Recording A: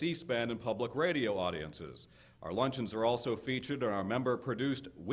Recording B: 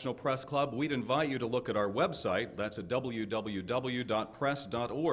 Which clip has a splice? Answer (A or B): A